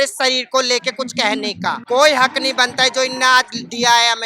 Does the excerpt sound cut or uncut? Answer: cut